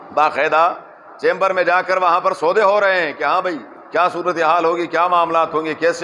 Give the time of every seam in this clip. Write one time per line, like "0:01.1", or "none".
none